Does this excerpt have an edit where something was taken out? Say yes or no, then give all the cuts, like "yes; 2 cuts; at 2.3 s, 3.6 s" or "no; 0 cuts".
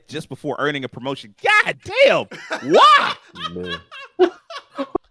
no; 0 cuts